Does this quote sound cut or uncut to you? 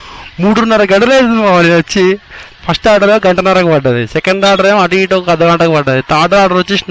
uncut